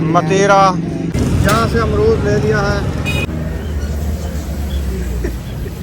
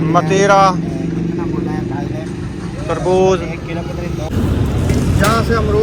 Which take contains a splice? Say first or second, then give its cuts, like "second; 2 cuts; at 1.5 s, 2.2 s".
first; 2 cuts; at 1.1 s, 3.5 s